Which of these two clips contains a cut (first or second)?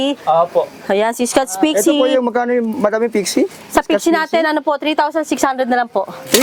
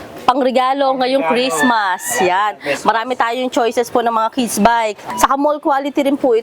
second